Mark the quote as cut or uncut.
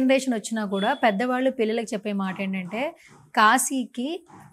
uncut